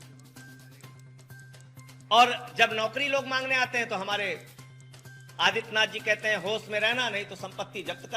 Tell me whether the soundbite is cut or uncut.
cut